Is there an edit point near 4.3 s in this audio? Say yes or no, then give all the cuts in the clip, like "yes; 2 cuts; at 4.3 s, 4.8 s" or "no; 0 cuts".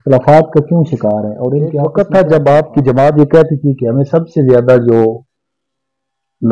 no; 1 cut; at 1.8 s